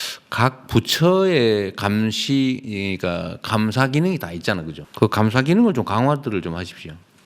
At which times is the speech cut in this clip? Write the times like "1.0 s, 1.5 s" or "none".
4.8 s

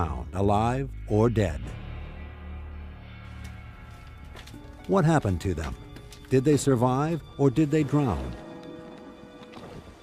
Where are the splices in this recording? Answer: 1.3 s

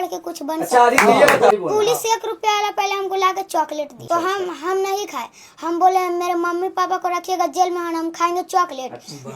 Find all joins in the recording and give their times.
1.5 s, 4.1 s

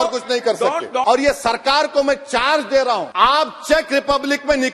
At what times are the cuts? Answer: 1.0 s, 3.1 s

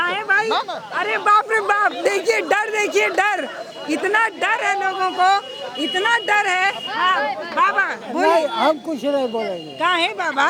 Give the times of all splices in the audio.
none

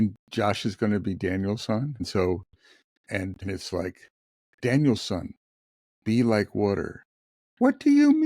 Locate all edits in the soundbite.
2.1 s, 3.4 s

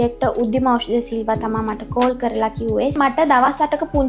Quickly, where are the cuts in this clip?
2.9 s

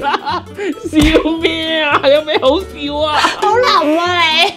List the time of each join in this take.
none

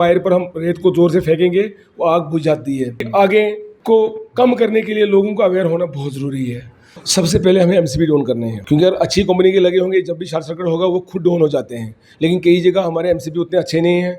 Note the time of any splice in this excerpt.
3.1 s, 3.7 s, 6.9 s, 8.5 s

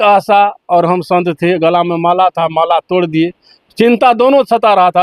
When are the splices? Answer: none

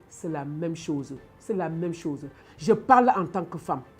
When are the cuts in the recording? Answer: 2.3 s

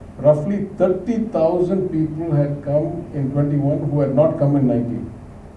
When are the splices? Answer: none

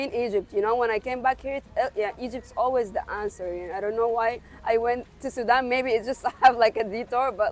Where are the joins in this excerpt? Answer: none

